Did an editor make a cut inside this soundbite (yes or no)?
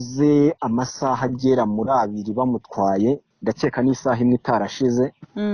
no